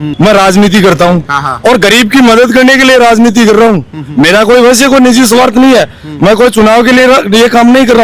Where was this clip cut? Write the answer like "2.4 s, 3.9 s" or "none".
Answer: none